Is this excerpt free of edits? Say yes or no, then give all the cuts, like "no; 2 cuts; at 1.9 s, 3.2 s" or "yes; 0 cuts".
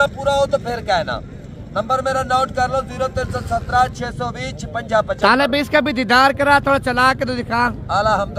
yes; 0 cuts